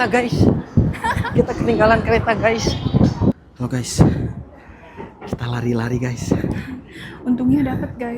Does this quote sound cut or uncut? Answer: cut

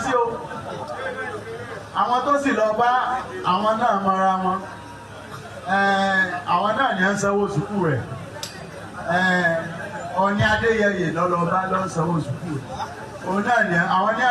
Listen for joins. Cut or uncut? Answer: cut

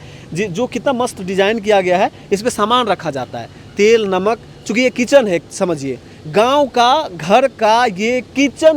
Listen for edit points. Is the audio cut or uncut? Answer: uncut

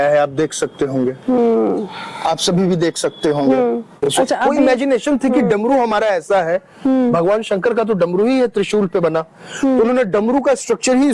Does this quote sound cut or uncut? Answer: cut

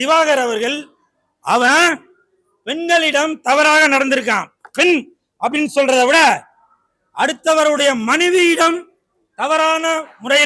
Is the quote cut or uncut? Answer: uncut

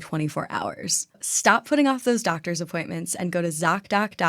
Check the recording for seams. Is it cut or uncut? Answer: cut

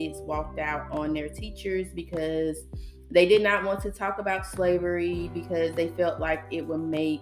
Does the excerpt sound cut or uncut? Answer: uncut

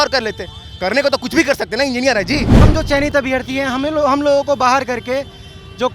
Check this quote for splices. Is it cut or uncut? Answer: cut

